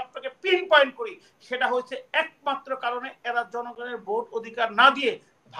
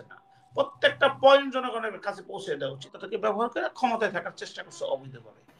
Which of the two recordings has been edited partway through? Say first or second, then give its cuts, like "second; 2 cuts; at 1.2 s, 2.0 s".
second; 1 cut; at 3.0 s